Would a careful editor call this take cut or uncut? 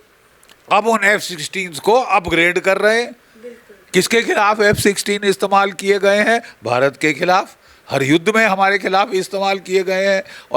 uncut